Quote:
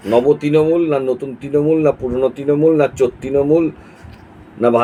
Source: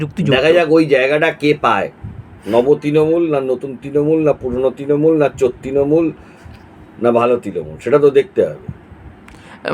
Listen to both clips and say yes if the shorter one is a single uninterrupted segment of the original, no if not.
yes